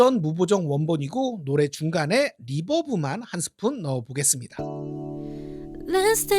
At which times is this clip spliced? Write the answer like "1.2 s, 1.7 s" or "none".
4.4 s